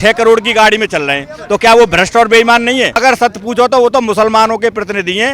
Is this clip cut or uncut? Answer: cut